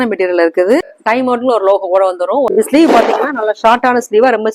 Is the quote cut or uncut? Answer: cut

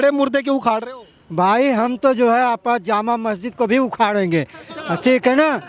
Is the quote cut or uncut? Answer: uncut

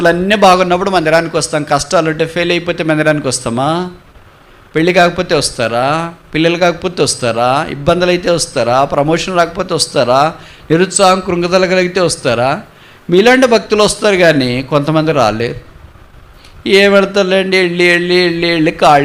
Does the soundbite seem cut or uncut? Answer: uncut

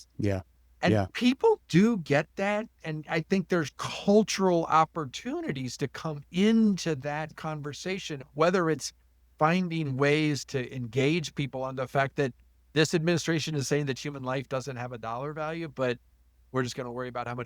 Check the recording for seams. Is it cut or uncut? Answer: cut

